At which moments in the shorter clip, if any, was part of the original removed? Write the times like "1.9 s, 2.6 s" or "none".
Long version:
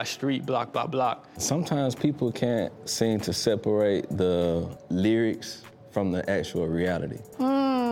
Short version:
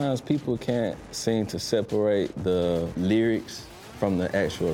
2.9 s